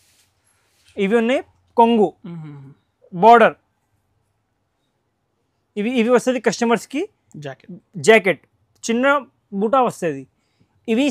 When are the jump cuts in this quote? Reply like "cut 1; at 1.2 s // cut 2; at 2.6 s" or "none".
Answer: none